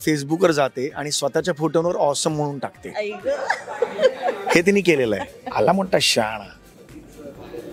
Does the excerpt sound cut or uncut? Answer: cut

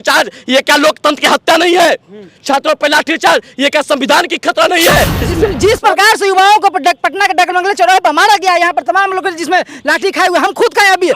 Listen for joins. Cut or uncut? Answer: cut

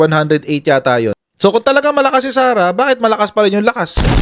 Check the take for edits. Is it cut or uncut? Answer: cut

